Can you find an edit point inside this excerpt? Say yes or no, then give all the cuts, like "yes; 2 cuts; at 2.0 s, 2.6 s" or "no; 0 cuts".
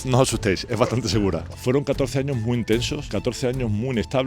yes; 2 cuts; at 1.4 s, 3.0 s